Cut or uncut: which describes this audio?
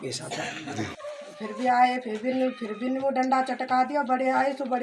cut